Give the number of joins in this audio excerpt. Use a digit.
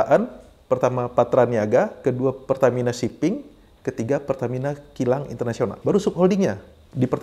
2